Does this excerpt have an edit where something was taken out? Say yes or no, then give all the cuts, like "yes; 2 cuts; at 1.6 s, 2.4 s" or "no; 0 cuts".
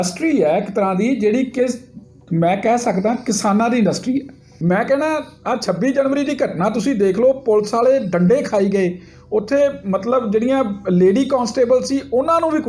yes; 1 cut; at 4.4 s